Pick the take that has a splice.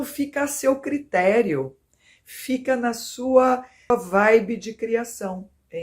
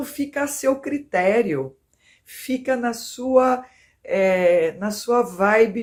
first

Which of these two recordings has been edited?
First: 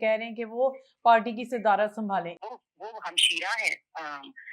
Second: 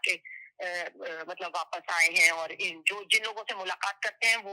first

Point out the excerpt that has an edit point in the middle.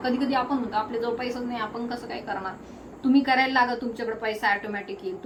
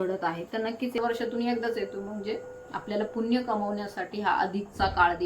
second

